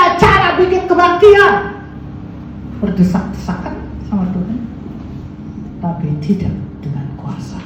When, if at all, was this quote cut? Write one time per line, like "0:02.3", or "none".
none